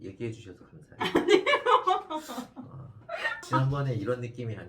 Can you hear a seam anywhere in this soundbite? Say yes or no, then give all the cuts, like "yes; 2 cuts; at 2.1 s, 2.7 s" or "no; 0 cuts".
no; 0 cuts